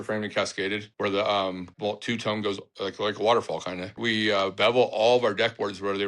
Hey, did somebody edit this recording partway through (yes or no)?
yes